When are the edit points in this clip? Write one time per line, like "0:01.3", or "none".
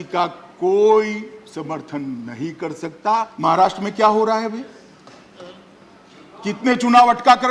0:03.3